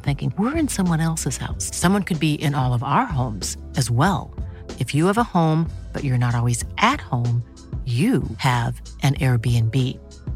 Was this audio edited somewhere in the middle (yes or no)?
no